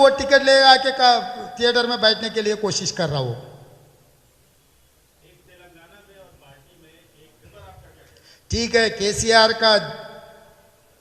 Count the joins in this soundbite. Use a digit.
1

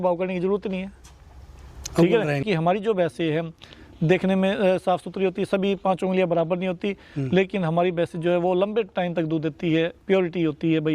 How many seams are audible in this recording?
1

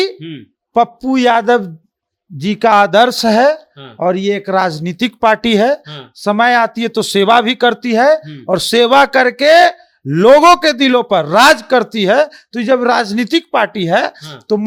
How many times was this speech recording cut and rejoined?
0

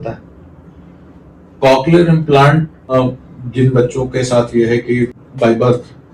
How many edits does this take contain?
2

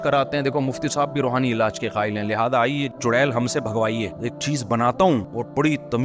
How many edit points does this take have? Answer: 1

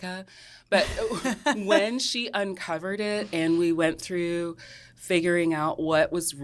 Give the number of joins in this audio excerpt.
0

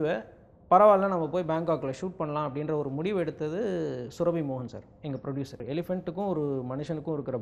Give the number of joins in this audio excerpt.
1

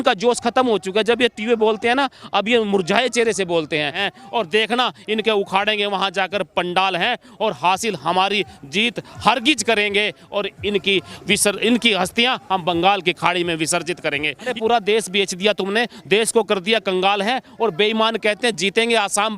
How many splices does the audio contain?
2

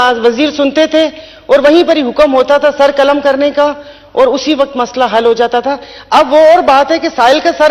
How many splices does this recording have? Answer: 0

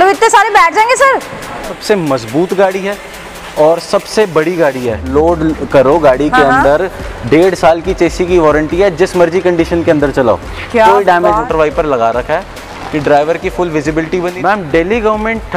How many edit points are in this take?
4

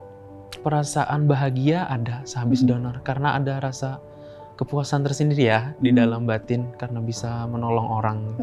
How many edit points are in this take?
0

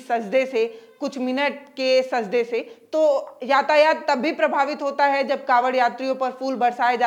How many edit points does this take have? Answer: 0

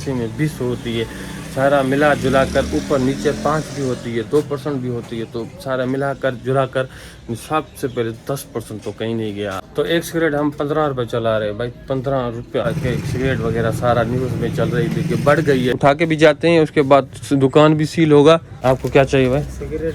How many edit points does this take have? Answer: 4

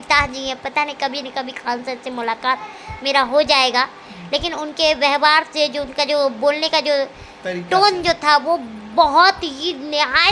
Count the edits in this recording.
0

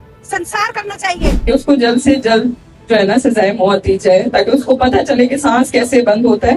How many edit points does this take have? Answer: 1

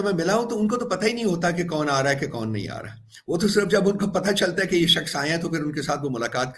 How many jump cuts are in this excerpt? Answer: 0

